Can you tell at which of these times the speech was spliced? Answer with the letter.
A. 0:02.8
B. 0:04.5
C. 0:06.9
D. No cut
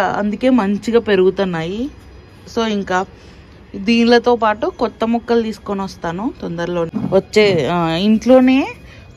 C